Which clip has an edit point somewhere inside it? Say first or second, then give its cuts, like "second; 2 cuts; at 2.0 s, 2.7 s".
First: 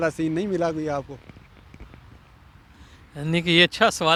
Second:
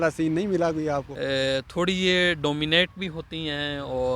second; 1 cut; at 1.1 s